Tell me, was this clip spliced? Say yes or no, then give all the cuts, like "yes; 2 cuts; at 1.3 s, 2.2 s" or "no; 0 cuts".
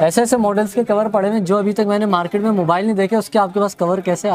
no; 0 cuts